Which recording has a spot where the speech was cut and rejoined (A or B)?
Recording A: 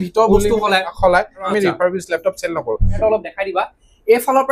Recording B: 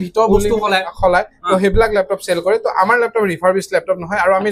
A